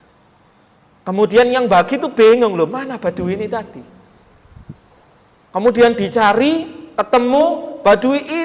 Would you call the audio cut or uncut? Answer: uncut